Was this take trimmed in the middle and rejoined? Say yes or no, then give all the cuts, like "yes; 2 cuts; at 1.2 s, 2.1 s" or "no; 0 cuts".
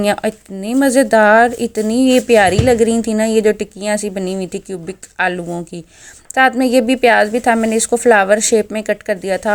no; 0 cuts